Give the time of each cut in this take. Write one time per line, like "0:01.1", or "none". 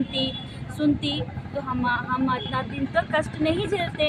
none